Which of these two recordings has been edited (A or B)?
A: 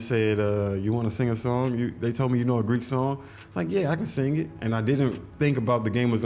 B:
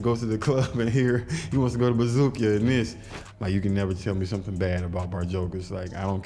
B